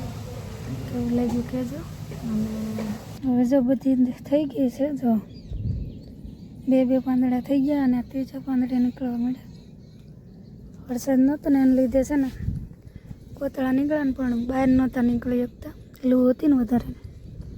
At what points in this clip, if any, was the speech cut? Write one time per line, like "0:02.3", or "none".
0:03.0